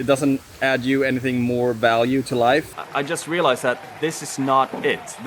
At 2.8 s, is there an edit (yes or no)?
yes